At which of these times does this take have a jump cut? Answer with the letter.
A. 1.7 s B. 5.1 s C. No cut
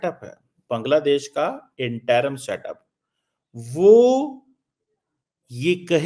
C